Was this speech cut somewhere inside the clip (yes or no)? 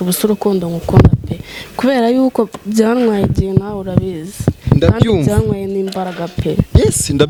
no